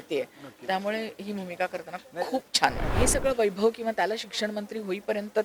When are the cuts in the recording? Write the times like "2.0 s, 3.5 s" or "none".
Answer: 2.9 s